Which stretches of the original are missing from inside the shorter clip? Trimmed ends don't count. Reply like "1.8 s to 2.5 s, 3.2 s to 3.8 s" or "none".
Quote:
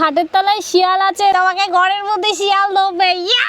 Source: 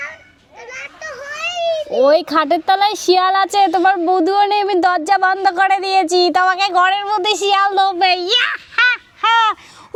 3.7 s to 6.3 s